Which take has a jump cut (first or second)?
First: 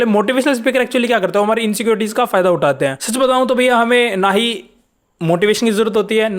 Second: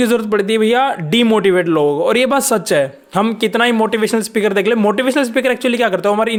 first